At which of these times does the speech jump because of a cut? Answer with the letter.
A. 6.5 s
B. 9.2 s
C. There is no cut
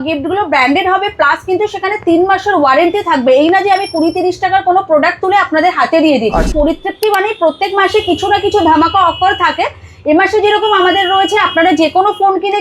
A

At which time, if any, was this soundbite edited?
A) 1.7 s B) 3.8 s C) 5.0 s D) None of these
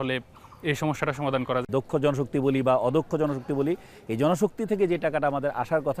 A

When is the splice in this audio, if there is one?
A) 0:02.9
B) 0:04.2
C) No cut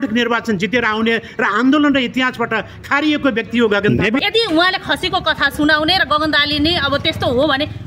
B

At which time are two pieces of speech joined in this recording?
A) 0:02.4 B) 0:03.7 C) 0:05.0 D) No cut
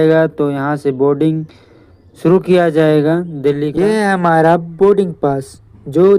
B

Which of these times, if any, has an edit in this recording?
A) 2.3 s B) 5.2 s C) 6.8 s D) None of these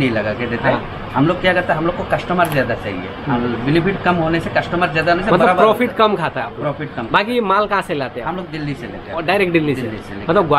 D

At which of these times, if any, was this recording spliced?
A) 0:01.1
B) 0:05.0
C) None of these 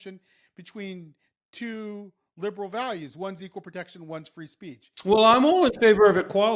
B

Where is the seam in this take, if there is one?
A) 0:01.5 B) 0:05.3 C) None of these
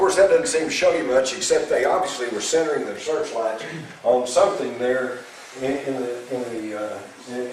B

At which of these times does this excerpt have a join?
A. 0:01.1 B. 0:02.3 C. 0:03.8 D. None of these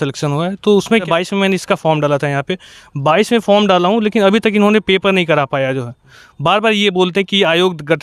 A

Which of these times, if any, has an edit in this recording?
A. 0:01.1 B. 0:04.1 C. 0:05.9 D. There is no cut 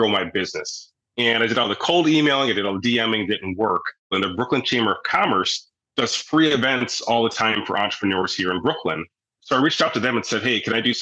B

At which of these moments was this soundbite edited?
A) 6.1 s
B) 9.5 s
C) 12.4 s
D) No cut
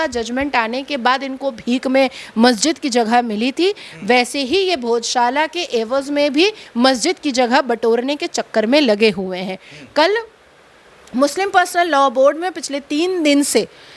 D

